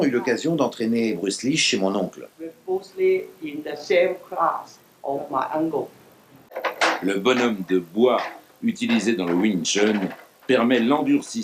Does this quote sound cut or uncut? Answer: cut